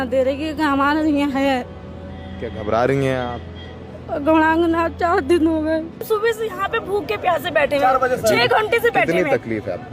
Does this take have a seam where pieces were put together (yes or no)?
yes